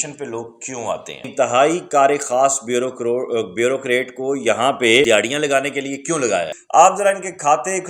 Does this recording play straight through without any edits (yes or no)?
no